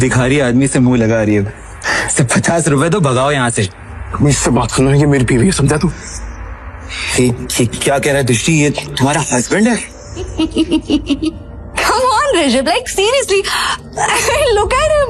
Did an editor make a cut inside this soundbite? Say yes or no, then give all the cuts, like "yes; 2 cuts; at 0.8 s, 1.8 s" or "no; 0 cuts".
yes; 1 cut; at 10.3 s